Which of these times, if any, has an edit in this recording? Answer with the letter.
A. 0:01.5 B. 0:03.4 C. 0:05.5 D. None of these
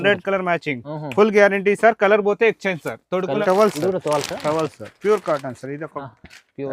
B